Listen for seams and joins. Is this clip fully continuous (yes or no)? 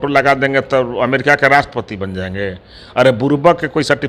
yes